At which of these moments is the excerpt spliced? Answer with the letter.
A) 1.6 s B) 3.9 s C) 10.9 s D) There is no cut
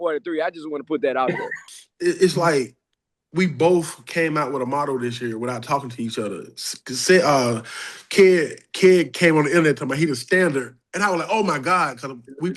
A